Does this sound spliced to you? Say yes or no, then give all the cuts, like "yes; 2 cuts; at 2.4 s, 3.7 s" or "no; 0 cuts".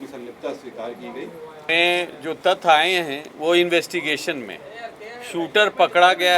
yes; 1 cut; at 1.6 s